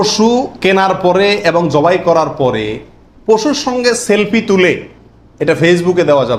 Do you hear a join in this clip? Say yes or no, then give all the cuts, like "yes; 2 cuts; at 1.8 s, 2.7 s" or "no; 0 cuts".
no; 0 cuts